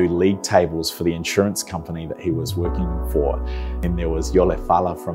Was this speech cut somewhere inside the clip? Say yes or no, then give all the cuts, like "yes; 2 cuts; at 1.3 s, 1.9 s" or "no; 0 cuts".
yes; 1 cut; at 3.7 s